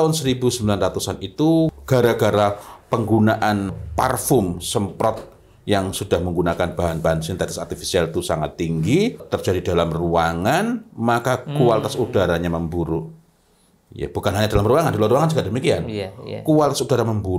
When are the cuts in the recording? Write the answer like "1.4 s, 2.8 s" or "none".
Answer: 1.7 s, 3.8 s, 9.2 s